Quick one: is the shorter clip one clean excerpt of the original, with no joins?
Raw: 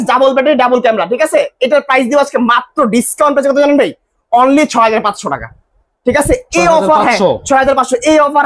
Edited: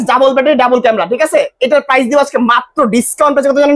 yes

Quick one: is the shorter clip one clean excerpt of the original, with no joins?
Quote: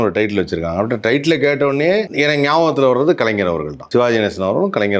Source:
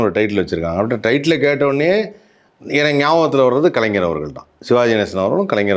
no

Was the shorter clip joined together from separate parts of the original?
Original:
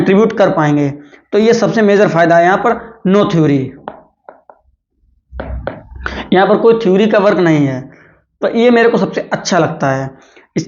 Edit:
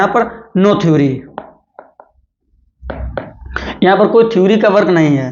no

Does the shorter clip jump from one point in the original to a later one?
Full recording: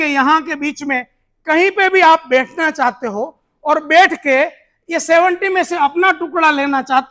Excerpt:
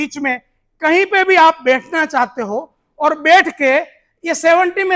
no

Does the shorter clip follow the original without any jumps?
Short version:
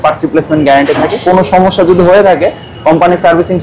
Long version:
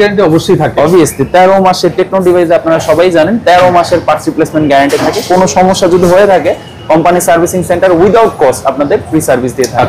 yes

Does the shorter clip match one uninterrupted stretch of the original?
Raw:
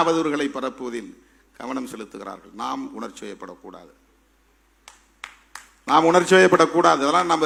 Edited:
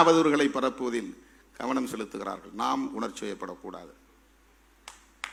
yes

